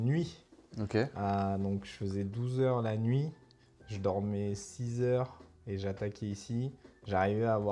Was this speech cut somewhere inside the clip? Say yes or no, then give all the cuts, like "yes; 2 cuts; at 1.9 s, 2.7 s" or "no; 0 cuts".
no; 0 cuts